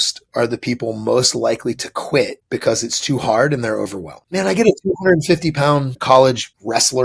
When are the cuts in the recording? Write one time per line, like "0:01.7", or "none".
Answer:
0:06.0